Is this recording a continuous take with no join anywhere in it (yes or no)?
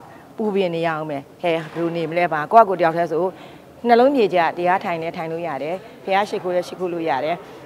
yes